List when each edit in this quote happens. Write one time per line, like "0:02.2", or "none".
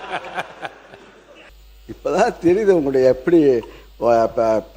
0:01.7